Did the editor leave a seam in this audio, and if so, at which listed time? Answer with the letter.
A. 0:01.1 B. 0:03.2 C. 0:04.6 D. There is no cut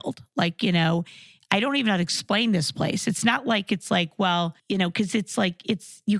C